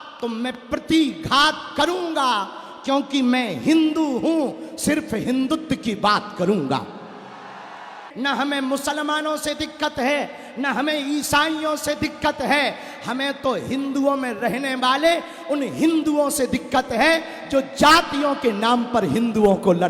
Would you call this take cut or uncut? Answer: cut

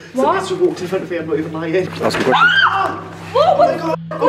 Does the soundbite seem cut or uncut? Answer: cut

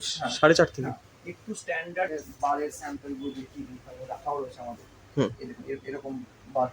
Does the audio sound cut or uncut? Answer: cut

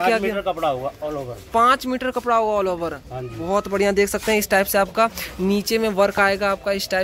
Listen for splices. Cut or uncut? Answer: uncut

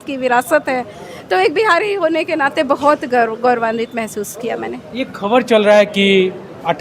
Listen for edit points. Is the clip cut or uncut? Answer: uncut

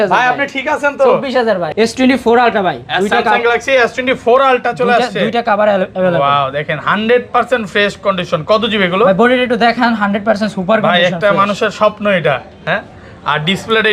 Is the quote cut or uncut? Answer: cut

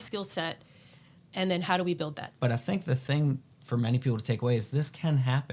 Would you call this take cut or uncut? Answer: cut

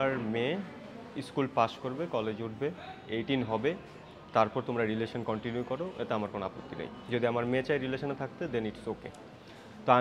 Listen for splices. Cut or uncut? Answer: uncut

